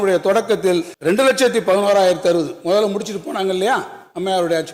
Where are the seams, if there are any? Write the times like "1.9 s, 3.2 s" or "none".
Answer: 0.9 s